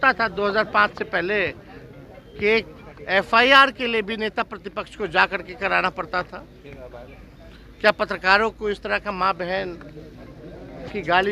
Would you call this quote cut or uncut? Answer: uncut